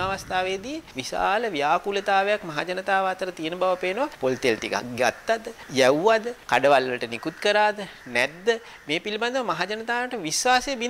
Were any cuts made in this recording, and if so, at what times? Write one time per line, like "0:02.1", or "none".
0:00.9
0:04.1
0:05.6
0:06.4